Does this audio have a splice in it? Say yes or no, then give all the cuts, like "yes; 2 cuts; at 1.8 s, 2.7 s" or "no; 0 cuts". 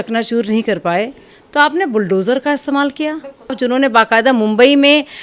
yes; 1 cut; at 3.6 s